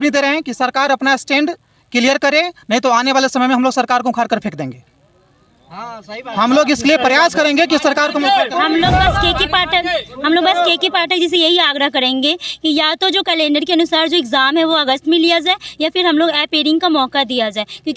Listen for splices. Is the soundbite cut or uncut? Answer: uncut